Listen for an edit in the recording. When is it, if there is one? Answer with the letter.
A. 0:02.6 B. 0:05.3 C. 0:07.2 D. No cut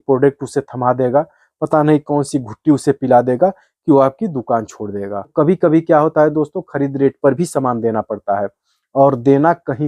B